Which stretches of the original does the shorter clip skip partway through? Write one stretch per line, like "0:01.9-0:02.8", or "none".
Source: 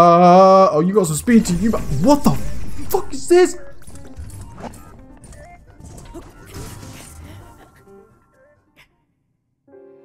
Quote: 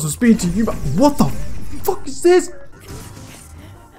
0:03.8-0:06.4